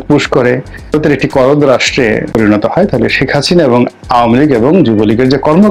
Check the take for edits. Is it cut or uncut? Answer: cut